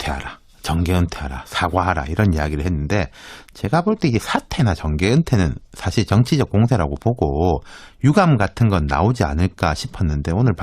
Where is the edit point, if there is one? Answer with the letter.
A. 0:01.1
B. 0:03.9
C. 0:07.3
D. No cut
A